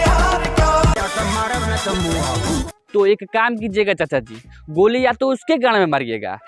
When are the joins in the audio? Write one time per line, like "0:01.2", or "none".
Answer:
0:00.9